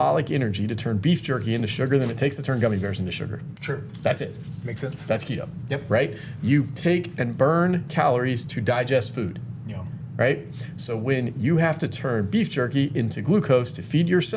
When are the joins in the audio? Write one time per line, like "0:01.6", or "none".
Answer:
none